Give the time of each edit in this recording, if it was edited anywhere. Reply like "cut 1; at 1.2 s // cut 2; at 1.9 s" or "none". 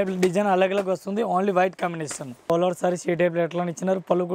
cut 1; at 2.5 s